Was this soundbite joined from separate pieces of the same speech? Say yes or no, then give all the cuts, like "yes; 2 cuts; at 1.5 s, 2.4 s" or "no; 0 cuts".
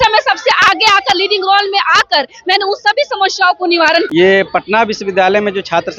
yes; 1 cut; at 4.1 s